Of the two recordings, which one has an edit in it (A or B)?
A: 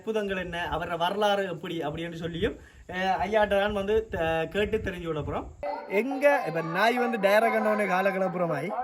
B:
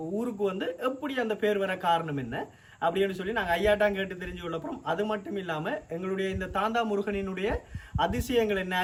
A